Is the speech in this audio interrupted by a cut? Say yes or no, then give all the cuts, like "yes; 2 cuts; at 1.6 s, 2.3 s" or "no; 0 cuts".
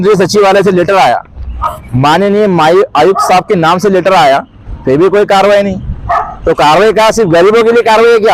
no; 0 cuts